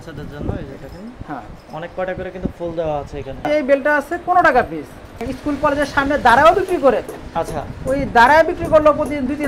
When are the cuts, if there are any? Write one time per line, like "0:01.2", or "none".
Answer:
0:03.4
0:05.2